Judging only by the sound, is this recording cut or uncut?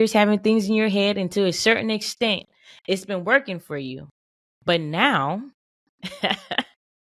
uncut